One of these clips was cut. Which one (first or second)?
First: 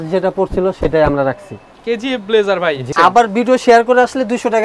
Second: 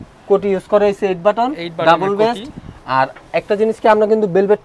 first